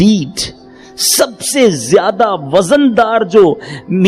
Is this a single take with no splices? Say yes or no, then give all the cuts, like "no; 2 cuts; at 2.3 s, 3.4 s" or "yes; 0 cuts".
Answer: yes; 0 cuts